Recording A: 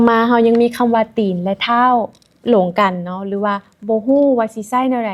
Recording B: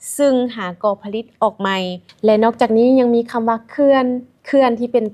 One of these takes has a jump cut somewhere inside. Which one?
B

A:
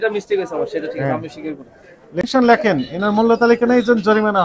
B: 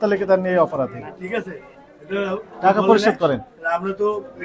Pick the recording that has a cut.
A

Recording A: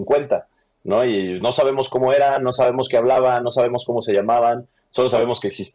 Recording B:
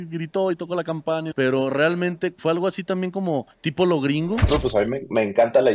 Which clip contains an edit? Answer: B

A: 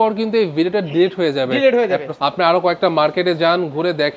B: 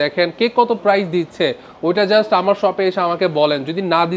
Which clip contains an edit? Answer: A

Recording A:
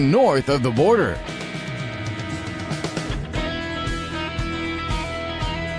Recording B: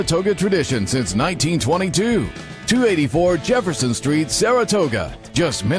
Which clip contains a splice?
A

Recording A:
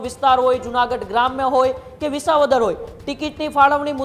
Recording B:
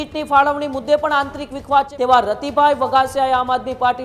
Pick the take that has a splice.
B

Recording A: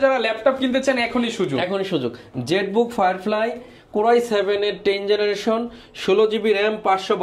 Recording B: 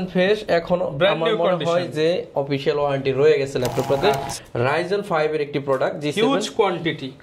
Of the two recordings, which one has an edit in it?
B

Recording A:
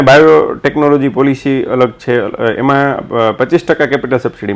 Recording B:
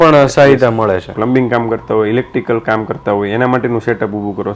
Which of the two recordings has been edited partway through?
B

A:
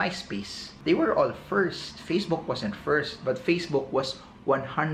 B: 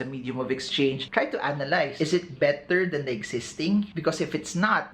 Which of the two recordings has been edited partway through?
B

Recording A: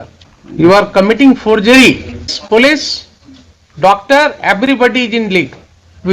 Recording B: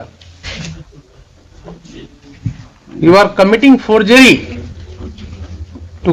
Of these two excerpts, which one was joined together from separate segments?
A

